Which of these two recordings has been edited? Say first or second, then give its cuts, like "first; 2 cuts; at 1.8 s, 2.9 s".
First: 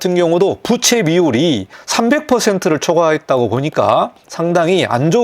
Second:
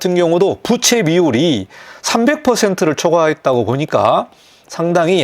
first; 2 cuts; at 1.8 s, 4.2 s